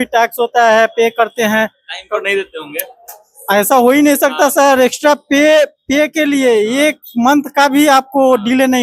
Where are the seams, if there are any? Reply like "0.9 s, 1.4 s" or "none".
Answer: none

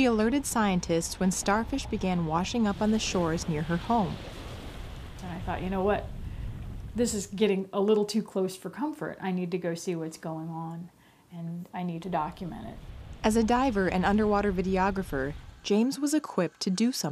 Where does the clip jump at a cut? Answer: none

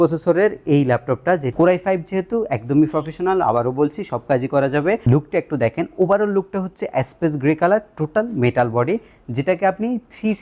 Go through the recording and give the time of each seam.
1.5 s, 5.0 s

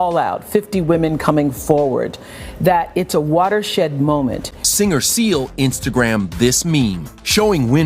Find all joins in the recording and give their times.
4.5 s

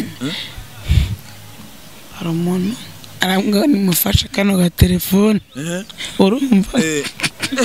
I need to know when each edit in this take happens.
3.0 s

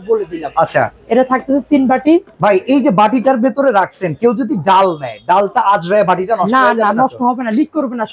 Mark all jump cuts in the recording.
none

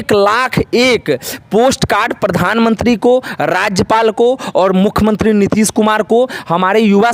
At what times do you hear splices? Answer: none

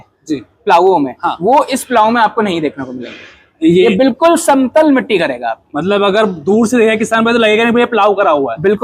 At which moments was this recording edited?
none

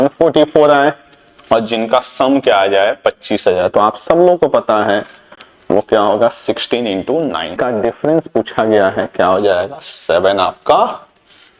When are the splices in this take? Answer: 7.6 s

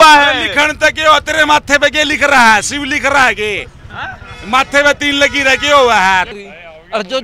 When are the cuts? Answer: 6.3 s

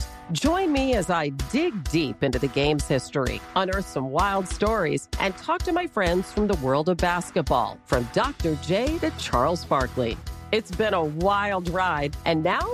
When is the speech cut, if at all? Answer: none

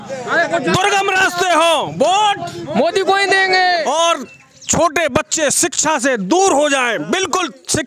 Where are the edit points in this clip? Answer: 3.8 s

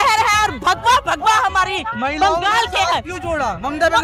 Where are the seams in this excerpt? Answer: none

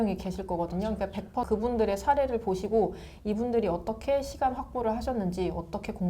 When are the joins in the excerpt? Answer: 1.5 s

